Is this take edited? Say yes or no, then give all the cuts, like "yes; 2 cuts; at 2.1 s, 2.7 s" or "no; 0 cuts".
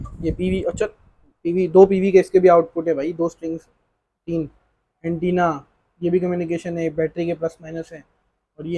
no; 0 cuts